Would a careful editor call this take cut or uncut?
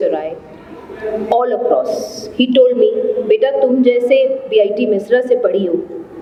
uncut